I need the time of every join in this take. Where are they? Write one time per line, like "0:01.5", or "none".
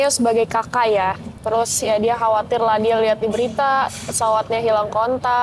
0:01.3